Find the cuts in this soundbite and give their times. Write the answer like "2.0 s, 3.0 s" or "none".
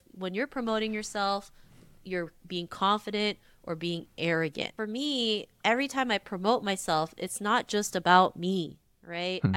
4.7 s